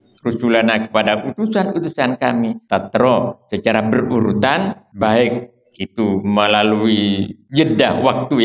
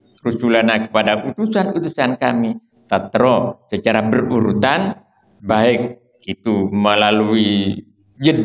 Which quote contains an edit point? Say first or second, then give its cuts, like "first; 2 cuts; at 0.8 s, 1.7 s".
first; 3 cuts; at 2.6 s, 4.8 s, 7.3 s